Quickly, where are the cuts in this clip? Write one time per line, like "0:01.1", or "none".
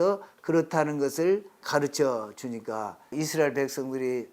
0:01.6
0:03.1